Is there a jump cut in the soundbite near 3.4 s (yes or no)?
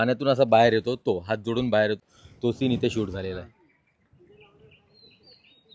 no